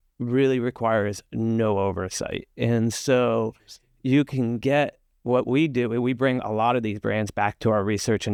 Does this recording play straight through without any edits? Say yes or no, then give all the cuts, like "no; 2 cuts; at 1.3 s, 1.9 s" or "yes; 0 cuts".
yes; 0 cuts